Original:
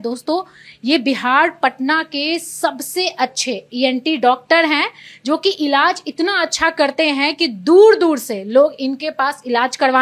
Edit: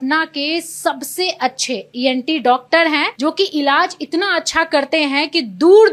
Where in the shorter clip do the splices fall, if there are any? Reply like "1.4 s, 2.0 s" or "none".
3.1 s

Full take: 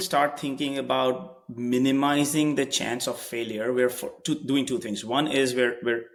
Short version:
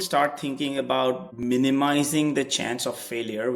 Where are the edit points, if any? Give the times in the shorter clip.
1.3 s

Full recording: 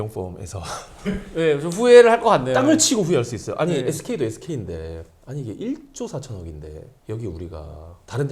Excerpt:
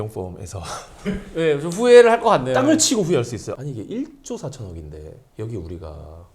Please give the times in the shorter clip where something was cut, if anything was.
3.5 s

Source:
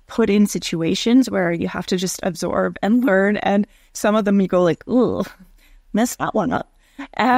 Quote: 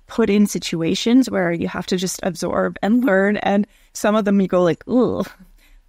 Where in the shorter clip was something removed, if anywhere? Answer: none

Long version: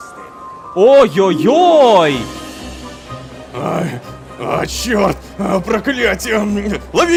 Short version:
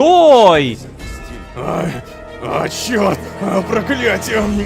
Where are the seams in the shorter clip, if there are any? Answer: 0.9 s

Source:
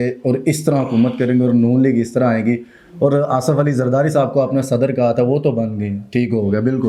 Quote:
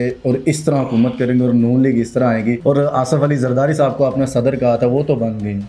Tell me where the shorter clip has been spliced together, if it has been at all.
2.6 s

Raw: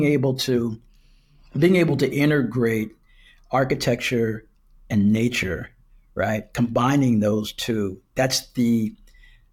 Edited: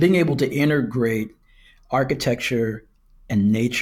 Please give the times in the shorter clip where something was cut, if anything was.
none

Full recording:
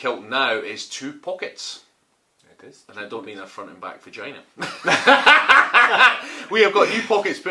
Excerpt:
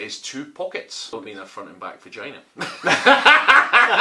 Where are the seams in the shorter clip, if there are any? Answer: 1.1 s

